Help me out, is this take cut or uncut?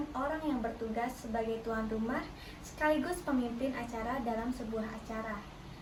uncut